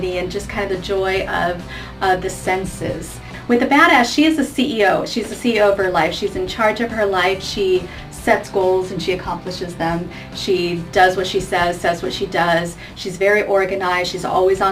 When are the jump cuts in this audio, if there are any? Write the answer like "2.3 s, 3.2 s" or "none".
3.3 s